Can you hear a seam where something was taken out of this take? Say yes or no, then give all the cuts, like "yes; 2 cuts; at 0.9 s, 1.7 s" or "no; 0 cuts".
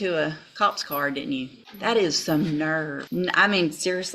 yes; 2 cuts; at 1.6 s, 3.0 s